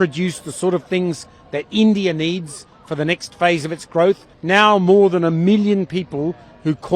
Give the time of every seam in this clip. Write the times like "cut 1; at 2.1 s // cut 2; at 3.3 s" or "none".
cut 1; at 4.3 s